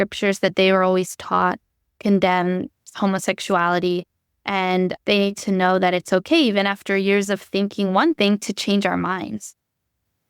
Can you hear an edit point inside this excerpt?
no; 0 cuts

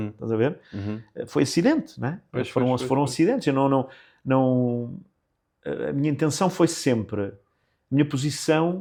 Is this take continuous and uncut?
yes; 0 cuts

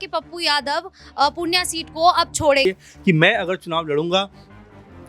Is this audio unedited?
no; 1 cut; at 2.6 s

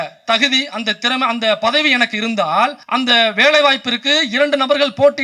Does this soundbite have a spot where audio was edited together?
yes; 1 cut; at 2.8 s

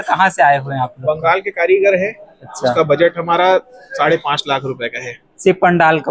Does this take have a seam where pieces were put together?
no; 0 cuts

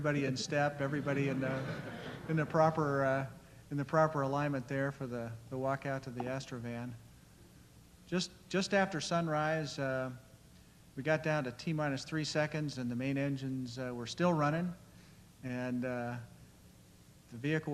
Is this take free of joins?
yes; 0 cuts

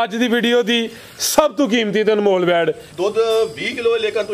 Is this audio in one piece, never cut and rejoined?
no; 1 cut; at 2.8 s

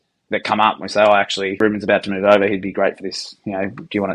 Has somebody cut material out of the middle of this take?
yes; 1 cut; at 1.6 s

